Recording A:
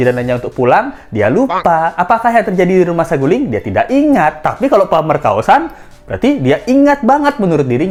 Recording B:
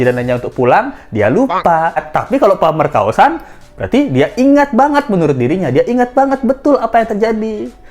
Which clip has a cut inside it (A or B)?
B